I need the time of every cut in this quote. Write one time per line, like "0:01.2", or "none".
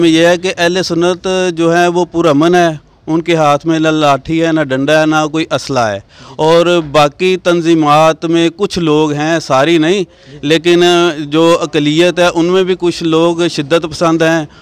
none